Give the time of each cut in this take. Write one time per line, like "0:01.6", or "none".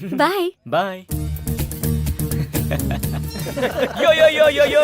0:01.0
0:03.3